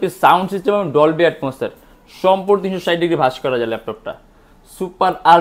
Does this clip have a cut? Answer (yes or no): no